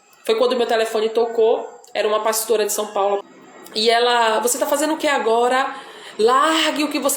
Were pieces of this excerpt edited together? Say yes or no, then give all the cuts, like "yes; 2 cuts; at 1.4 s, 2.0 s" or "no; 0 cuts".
yes; 1 cut; at 3.3 s